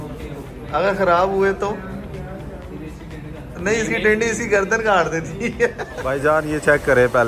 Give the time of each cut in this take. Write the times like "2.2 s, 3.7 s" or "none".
6.1 s